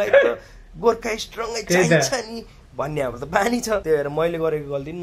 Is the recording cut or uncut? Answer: cut